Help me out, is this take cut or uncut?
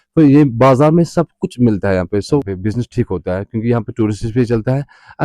cut